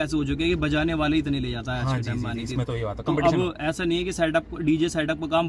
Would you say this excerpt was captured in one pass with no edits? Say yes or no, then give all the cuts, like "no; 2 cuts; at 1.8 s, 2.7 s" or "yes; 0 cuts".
yes; 0 cuts